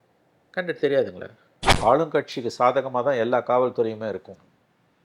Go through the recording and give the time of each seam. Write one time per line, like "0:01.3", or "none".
0:01.6